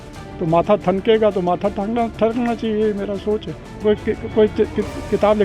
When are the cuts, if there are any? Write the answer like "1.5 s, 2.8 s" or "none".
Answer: 3.7 s